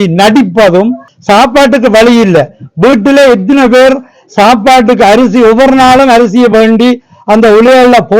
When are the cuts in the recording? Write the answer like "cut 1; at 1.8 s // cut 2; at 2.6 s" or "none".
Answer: cut 1; at 1.1 s